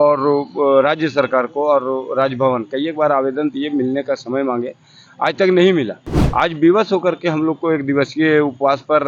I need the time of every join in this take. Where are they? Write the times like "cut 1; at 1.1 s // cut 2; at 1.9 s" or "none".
none